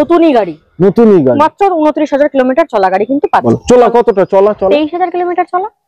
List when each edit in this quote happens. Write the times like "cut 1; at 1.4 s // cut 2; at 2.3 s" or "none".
cut 1; at 3.4 s